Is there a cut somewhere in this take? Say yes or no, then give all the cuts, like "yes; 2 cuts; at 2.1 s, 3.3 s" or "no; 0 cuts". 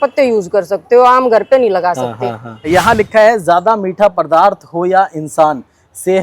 yes; 1 cut; at 2.7 s